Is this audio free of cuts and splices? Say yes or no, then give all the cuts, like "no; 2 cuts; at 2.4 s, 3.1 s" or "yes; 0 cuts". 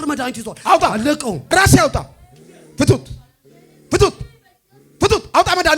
no; 1 cut; at 1.4 s